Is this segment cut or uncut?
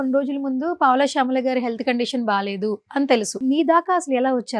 cut